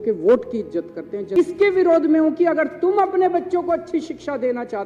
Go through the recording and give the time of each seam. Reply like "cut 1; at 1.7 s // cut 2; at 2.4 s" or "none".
cut 1; at 1.3 s